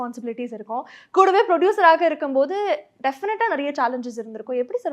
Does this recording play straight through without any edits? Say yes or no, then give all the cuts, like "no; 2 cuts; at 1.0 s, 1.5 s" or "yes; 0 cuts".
yes; 0 cuts